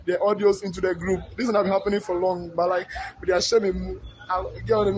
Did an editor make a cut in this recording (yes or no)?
yes